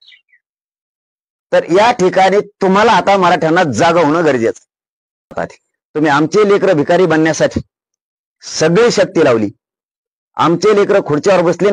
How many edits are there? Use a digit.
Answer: 1